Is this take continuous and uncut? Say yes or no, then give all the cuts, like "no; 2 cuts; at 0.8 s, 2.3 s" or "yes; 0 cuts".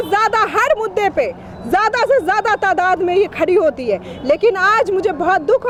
yes; 0 cuts